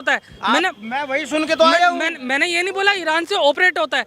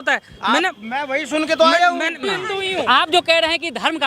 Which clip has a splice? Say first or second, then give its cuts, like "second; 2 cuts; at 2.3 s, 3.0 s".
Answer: second; 1 cut; at 2.2 s